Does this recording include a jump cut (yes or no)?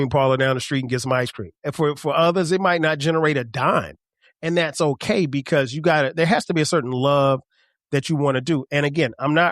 yes